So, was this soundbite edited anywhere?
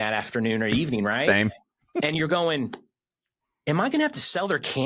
no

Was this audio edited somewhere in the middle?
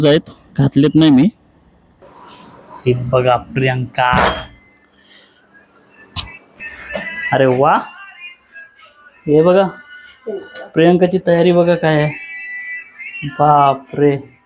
yes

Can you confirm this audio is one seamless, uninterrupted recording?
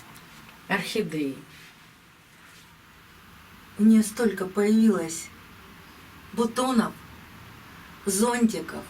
no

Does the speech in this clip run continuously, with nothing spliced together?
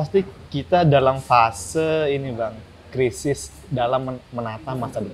yes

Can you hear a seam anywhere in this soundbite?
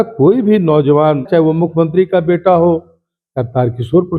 yes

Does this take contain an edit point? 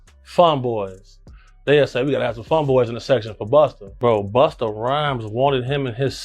yes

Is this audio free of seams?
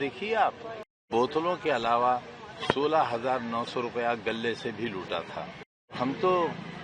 no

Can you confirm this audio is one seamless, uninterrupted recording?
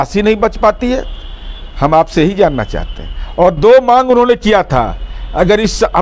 yes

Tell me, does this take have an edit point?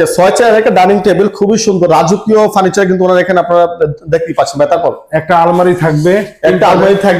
no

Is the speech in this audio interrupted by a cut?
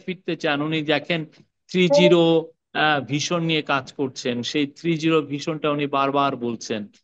no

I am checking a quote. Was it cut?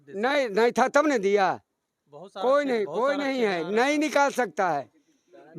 no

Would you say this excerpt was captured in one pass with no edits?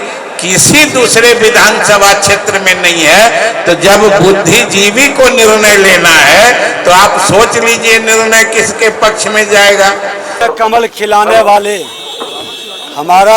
no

